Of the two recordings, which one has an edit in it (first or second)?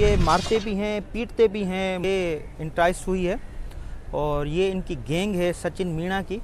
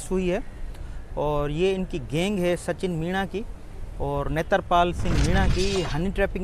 first